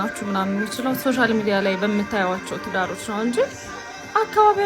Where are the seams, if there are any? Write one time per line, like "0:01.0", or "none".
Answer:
0:01.0